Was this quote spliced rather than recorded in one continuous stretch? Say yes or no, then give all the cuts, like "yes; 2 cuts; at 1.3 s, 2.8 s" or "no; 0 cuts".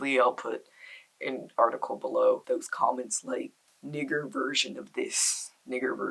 yes; 1 cut; at 2.4 s